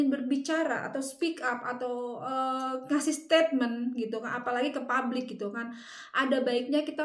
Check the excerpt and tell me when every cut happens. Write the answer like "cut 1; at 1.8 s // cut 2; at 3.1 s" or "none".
none